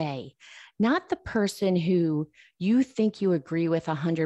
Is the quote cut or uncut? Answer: uncut